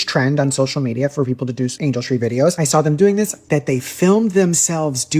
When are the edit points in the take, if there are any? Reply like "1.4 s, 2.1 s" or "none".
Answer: 1.8 s, 2.6 s, 3.4 s